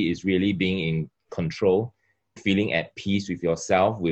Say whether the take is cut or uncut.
uncut